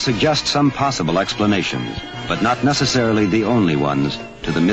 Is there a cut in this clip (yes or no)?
yes